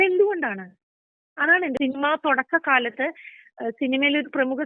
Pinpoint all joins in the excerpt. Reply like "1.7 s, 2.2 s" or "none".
1.8 s

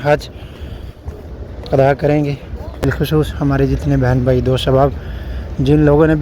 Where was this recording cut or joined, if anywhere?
2.8 s

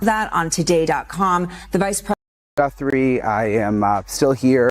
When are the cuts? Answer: 2.7 s

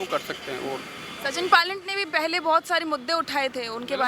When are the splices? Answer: none

